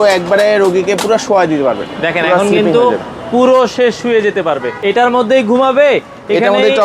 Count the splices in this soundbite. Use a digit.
1